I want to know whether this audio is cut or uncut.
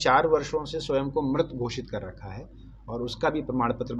uncut